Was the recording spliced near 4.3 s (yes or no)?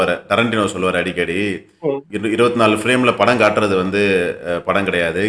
no